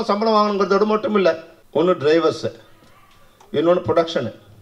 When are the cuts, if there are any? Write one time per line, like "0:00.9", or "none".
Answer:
0:01.5

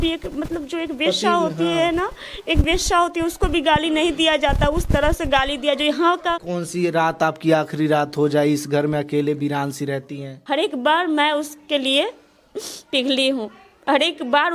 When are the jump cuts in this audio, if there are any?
0:06.4
0:10.3

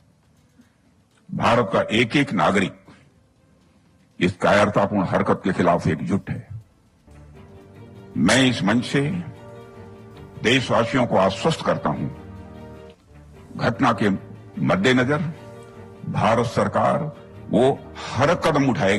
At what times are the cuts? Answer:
none

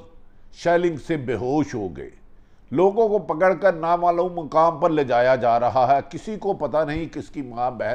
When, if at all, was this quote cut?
none

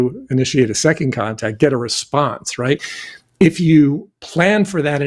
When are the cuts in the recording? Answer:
0:02.9

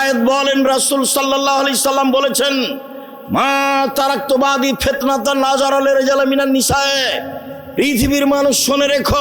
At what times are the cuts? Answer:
none

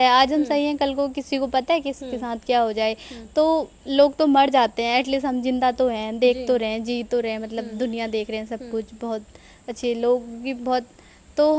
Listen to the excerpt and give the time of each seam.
none

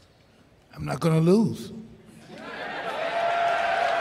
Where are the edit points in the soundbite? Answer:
none

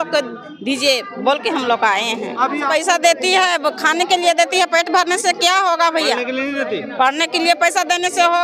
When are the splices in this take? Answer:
0:02.6

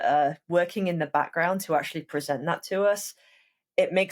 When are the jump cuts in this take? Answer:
none

